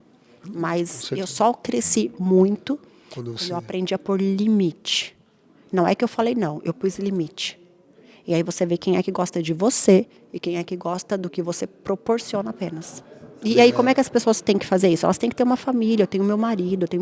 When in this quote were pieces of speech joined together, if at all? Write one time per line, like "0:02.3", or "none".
0:13.3

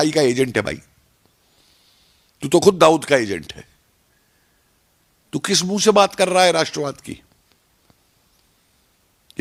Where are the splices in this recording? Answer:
none

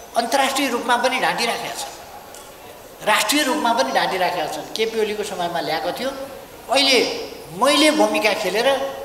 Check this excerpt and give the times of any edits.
none

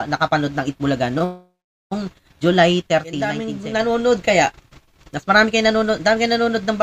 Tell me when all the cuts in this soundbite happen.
0:03.5

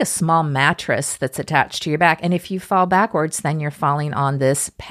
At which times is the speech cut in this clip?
none

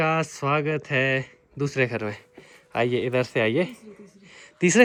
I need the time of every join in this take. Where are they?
none

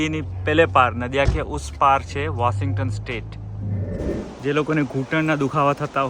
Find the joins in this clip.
0:03.9

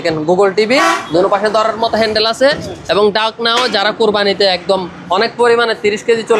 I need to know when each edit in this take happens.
0:01.0

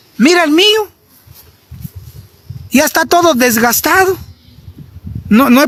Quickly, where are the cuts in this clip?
none

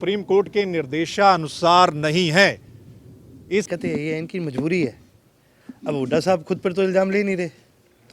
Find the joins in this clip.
0:03.7

